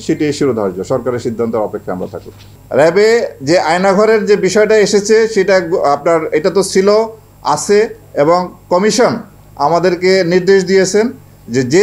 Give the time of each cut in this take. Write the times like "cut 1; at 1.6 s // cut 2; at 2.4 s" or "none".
cut 1; at 2.5 s